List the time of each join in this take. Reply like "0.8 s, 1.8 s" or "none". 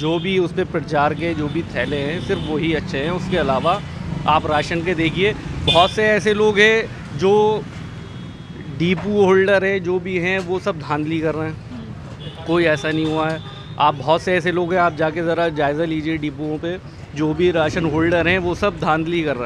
none